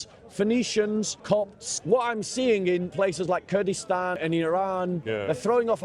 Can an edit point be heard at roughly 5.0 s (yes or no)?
yes